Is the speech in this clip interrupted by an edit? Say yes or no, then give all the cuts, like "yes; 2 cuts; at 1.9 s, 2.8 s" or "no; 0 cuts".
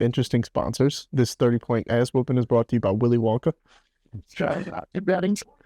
yes; 1 cut; at 1.0 s